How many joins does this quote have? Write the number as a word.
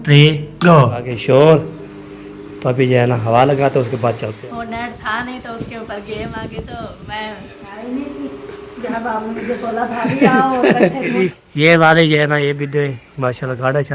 four